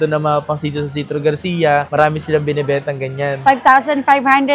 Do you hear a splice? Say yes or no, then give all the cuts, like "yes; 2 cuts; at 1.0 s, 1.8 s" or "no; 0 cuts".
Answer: no; 0 cuts